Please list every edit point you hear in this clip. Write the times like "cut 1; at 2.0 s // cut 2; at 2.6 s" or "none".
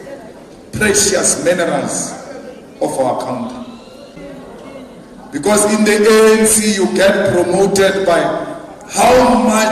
cut 1; at 4.1 s